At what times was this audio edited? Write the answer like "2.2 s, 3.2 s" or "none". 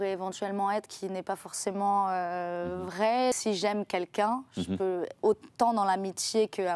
3.4 s